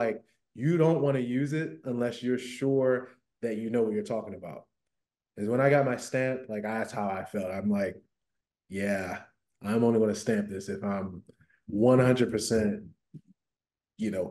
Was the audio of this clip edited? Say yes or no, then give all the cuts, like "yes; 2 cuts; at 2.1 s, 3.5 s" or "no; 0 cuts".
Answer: no; 0 cuts